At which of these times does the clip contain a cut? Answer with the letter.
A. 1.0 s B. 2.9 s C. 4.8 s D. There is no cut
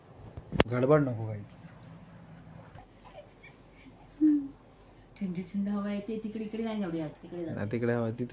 B